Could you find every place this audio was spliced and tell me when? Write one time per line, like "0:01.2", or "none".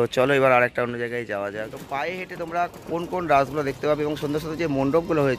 0:01.7